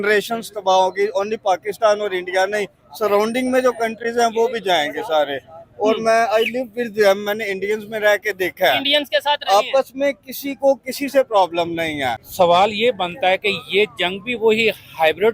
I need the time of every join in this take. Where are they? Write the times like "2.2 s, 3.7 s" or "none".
12.2 s